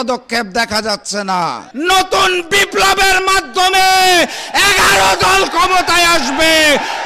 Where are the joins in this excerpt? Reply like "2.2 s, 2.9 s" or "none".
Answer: 1.6 s

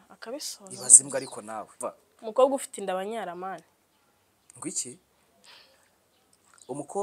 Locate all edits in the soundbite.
1.8 s

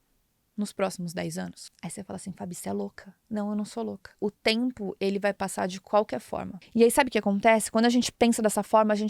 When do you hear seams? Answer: 1.6 s, 4.1 s, 6.6 s

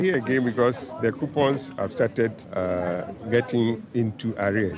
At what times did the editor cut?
2.4 s

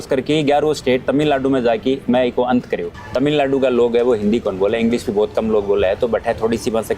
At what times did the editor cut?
3.0 s

